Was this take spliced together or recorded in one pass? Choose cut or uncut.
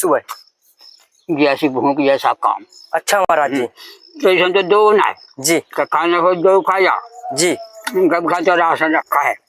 uncut